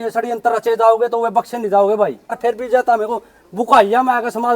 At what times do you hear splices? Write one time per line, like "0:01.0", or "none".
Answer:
0:02.4